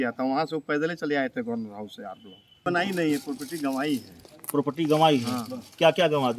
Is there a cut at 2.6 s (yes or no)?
yes